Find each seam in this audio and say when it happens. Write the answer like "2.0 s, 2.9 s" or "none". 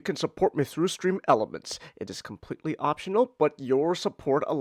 none